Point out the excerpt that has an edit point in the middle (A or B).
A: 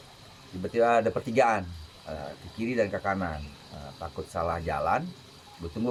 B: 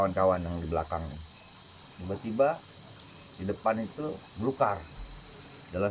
B